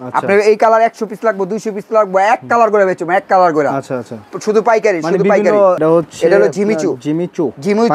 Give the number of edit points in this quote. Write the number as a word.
one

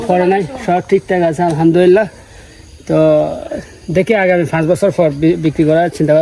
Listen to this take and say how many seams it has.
zero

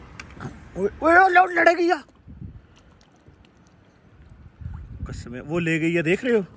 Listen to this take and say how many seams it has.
zero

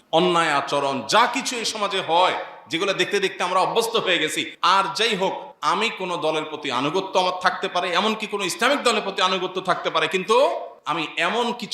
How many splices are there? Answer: three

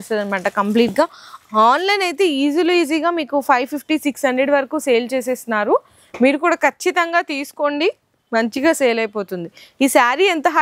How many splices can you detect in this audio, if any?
zero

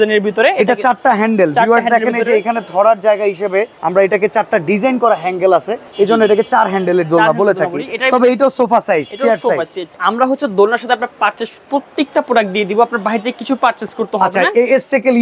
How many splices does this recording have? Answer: three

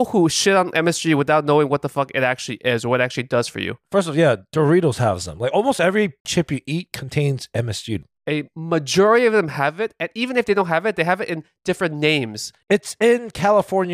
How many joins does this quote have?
two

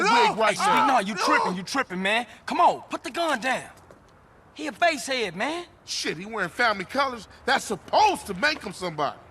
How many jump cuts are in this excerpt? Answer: one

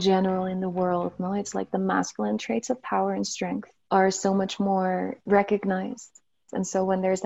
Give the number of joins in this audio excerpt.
three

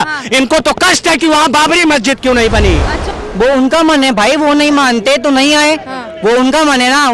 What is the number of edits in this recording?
one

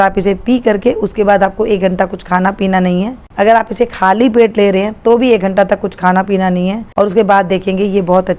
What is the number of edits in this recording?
one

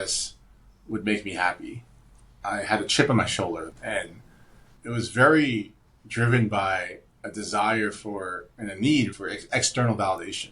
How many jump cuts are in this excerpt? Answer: three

